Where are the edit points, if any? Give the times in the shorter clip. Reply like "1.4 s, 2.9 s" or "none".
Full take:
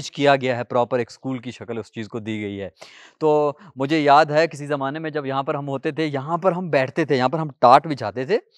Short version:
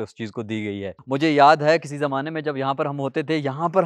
1.0 s